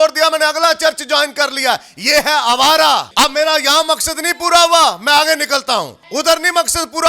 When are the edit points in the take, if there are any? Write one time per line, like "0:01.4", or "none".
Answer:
0:03.1
0:06.0